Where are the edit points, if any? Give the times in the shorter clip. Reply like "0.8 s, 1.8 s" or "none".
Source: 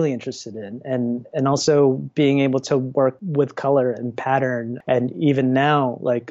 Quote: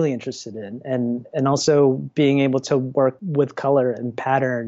none